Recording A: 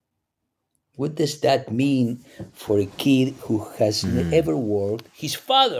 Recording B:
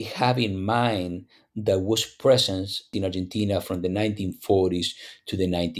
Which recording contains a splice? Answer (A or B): B